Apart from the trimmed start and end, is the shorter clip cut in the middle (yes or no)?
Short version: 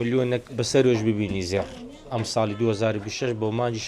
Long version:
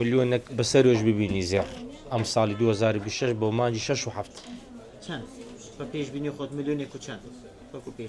no